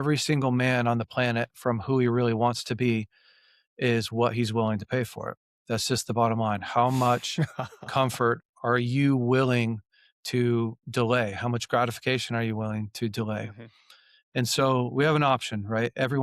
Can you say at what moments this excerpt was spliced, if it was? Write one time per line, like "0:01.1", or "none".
none